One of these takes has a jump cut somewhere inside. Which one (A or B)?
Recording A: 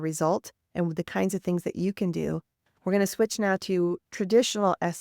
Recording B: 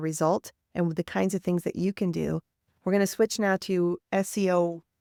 A